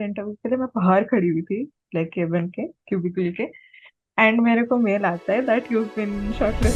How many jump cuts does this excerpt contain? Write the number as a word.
zero